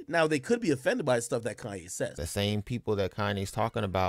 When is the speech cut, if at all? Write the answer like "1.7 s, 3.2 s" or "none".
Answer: 2.2 s